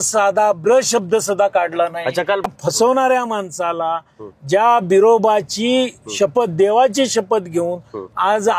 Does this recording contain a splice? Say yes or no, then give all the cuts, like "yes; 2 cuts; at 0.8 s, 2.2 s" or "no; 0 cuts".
yes; 1 cut; at 2.5 s